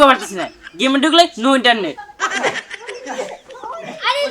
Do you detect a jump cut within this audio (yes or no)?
yes